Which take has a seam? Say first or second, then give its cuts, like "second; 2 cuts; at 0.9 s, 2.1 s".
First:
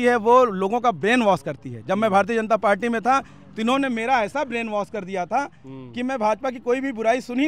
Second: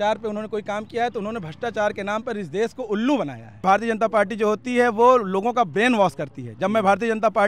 second; 1 cut; at 3.6 s